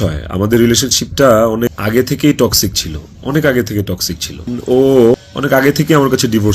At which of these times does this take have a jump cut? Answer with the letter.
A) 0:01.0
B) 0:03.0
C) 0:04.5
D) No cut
C